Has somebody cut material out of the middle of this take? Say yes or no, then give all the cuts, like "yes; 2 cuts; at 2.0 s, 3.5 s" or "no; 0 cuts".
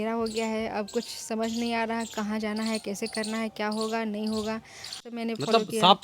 yes; 1 cut; at 5.0 s